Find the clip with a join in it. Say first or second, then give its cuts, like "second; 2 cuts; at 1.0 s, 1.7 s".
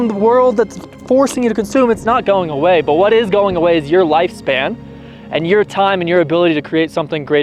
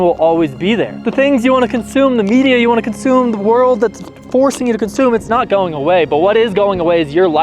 second; 1 cut; at 1.0 s